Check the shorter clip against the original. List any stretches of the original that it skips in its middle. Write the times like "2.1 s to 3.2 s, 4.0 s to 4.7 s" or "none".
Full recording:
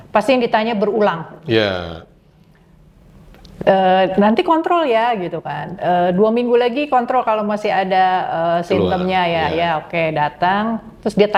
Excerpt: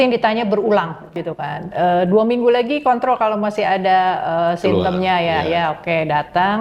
1.4 s to 5.2 s